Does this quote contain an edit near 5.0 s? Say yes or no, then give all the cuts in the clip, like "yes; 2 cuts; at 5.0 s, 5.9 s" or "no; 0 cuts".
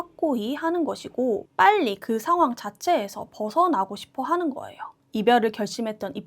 yes; 1 cut; at 5.0 s